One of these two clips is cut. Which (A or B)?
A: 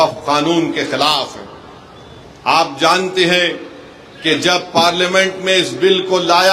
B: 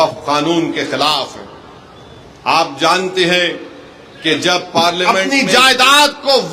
B